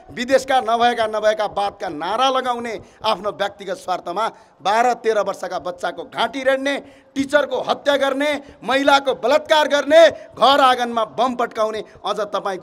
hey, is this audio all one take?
yes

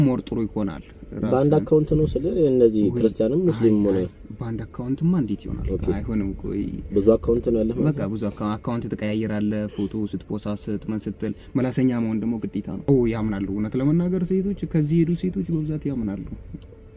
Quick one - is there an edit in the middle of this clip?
yes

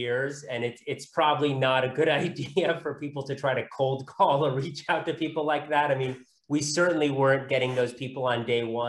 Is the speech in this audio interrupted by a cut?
no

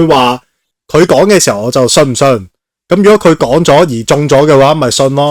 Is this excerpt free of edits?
yes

